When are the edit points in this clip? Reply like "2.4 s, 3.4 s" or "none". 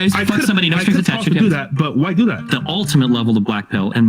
2.5 s